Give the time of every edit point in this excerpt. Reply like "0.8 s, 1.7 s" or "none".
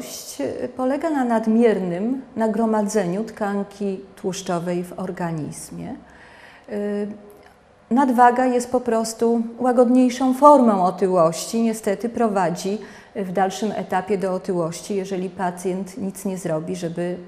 8.8 s